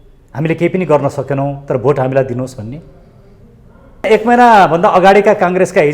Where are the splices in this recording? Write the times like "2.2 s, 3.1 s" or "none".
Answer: 4.1 s